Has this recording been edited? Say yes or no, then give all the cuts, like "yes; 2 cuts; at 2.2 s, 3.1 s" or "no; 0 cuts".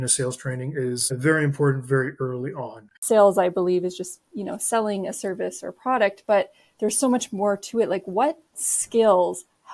yes; 2 cuts; at 1.0 s, 2.9 s